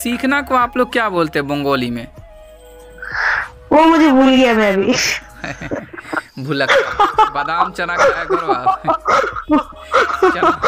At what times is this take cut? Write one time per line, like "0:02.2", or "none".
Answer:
none